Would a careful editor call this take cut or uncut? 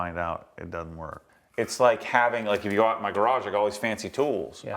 cut